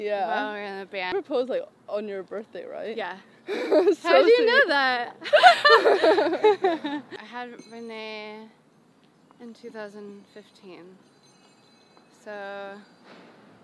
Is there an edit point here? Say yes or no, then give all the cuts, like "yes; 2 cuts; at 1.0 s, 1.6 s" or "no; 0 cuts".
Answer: yes; 2 cuts; at 1.1 s, 7.2 s